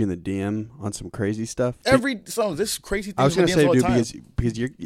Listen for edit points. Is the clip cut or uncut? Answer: cut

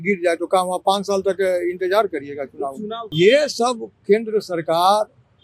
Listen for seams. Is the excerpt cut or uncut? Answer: cut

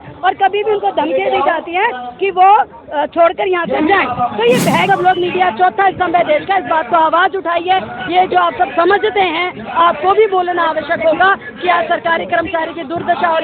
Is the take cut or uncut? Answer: cut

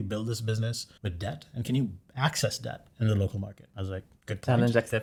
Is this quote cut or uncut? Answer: uncut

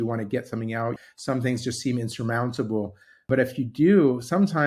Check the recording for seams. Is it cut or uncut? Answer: cut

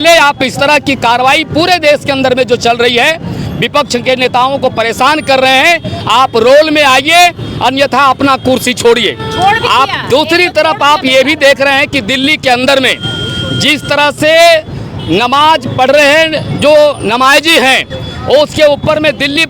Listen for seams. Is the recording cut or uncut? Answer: uncut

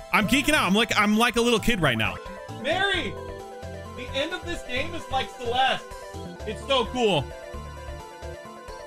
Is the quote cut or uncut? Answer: cut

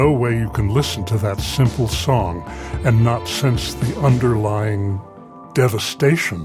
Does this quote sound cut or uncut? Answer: cut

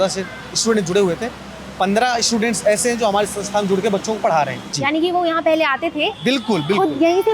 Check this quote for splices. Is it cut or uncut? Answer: cut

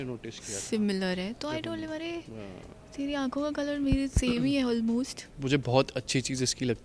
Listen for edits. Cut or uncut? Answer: cut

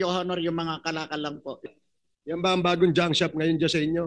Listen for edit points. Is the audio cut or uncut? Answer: cut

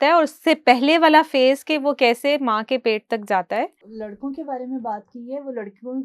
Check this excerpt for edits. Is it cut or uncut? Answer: cut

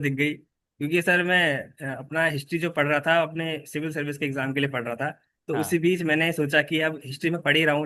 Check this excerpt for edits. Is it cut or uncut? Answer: uncut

